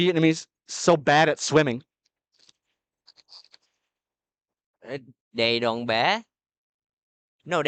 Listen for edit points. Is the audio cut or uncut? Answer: uncut